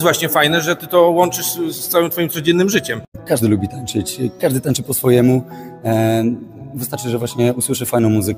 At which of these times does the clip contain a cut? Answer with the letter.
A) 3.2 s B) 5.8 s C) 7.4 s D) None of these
A